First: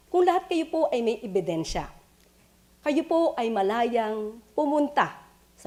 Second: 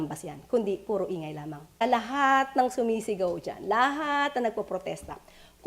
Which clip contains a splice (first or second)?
second